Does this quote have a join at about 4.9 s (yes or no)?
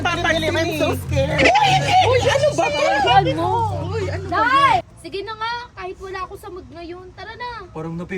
yes